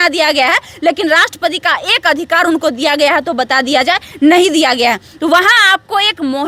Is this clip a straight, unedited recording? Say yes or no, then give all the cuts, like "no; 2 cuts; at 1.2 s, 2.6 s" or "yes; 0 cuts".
yes; 0 cuts